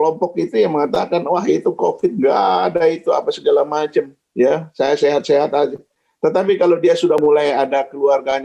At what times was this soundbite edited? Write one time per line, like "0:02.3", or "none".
0:04.2
0:07.2